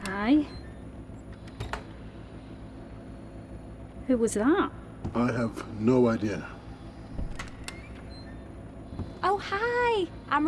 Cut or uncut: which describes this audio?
uncut